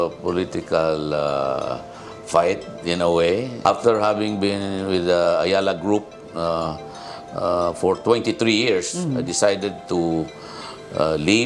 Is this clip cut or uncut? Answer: uncut